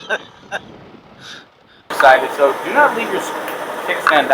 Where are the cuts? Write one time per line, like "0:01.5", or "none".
0:01.9